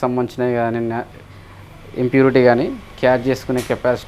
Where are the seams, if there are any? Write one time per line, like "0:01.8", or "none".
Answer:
none